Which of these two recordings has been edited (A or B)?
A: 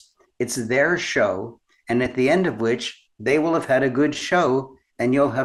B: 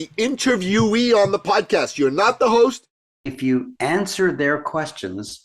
B